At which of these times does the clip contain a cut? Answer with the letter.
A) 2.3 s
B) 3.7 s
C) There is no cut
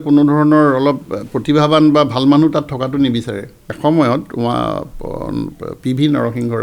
B